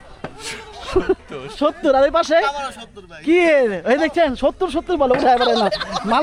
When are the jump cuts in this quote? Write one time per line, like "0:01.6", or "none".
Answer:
none